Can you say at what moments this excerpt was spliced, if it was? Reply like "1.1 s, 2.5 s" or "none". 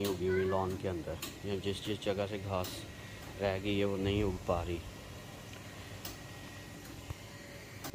none